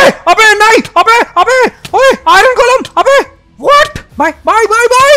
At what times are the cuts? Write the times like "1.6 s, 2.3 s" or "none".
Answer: 4.1 s